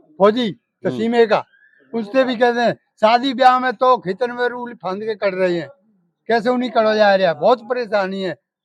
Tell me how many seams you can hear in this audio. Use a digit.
0